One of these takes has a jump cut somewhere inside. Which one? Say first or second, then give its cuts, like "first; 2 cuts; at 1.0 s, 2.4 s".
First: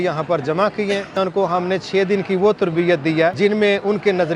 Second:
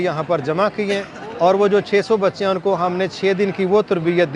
first; 2 cuts; at 1.1 s, 3.3 s